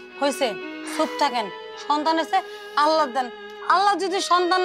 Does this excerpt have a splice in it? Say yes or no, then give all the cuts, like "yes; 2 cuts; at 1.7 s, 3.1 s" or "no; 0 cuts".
no; 0 cuts